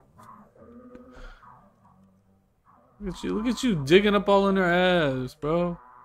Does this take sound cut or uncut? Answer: uncut